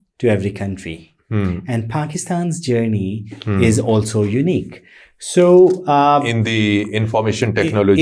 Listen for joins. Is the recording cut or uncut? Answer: uncut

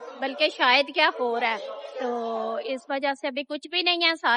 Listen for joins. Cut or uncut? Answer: uncut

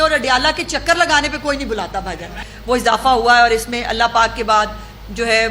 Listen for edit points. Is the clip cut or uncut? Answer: cut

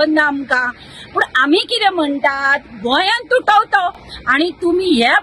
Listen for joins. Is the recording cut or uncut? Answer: uncut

